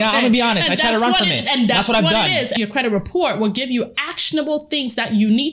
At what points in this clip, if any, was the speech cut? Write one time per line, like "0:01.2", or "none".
0:02.5